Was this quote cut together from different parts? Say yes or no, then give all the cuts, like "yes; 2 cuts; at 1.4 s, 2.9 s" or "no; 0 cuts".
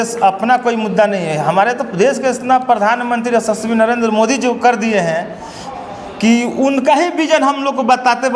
no; 0 cuts